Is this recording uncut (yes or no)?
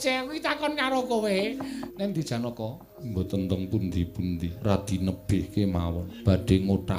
no